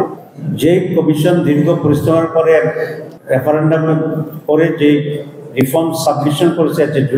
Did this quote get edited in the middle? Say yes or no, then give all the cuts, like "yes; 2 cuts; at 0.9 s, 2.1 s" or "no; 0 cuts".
no; 0 cuts